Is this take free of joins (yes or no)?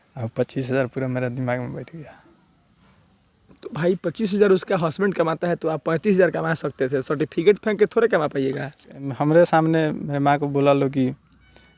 no